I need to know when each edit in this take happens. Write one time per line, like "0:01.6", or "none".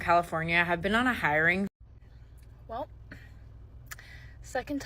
0:01.7

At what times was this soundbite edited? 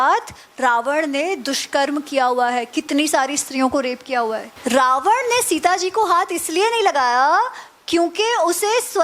0:04.5

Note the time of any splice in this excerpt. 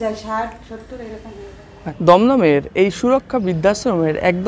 0:01.9

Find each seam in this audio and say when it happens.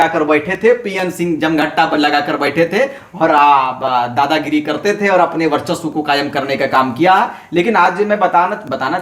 none

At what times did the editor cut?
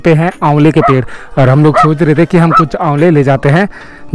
none

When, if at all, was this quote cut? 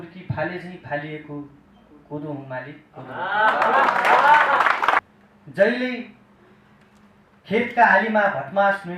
0:05.1

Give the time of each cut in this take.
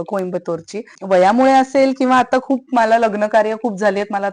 0:00.9

